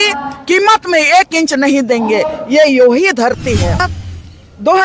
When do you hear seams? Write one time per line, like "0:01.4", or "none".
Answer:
0:03.8